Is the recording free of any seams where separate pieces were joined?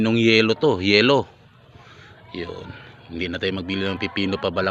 yes; 0 cuts

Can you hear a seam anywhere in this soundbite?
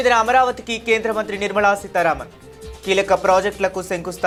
no; 0 cuts

